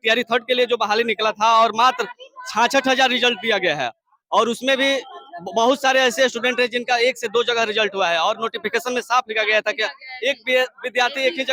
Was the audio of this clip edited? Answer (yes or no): no